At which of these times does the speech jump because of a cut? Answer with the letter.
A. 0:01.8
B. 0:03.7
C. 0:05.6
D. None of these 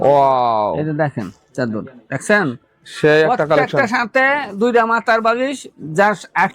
D